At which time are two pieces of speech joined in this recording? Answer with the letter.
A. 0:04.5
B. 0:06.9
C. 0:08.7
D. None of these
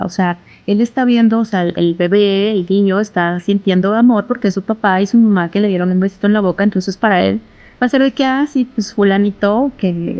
D